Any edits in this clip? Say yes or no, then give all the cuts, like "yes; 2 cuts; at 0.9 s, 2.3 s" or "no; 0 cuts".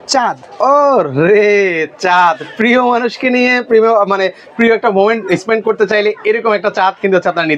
no; 0 cuts